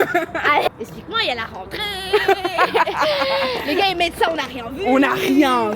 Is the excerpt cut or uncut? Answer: uncut